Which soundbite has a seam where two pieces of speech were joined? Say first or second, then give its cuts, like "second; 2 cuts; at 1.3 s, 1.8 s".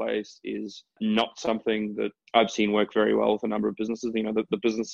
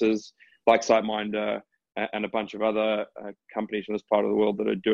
first; 2 cuts; at 1.0 s, 2.2 s